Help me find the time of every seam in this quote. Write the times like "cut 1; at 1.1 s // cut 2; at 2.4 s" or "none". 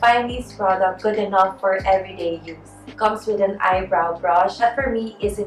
none

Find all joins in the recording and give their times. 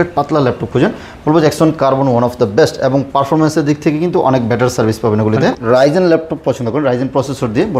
cut 1; at 5.5 s

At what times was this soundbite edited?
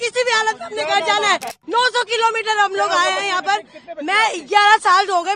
cut 1; at 1.6 s

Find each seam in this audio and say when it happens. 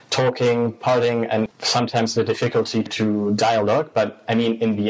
cut 1; at 1.5 s // cut 2; at 2.9 s

